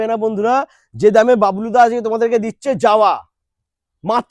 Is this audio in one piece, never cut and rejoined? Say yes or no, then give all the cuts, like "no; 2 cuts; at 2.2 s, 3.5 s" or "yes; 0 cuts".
yes; 0 cuts